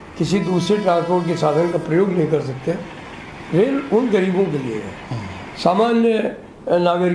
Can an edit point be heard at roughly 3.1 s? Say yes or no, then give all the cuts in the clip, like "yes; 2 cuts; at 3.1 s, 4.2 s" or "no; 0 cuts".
no; 0 cuts